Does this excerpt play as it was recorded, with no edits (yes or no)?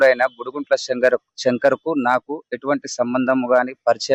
yes